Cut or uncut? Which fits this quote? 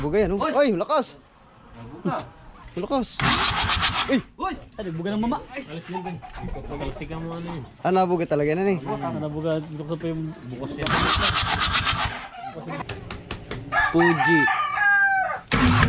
cut